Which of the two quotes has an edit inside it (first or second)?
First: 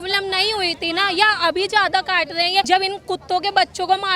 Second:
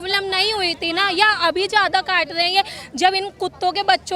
first